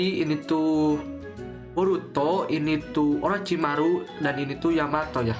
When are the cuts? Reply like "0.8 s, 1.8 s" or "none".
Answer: none